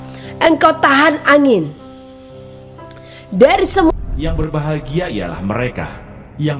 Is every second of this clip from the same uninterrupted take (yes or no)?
no